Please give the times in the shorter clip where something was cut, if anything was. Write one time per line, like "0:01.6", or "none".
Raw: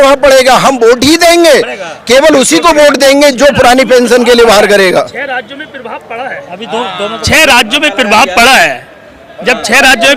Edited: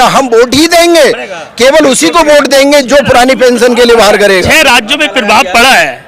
0:04.4